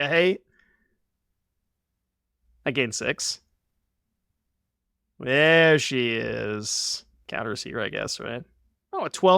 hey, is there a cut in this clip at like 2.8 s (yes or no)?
no